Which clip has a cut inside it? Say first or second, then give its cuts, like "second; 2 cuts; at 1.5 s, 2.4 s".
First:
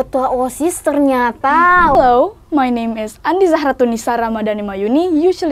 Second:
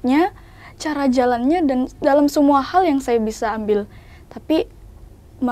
first; 1 cut; at 2.0 s